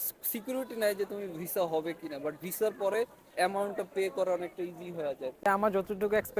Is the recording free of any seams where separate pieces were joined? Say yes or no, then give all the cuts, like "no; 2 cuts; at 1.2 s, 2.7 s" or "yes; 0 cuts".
no; 1 cut; at 5.5 s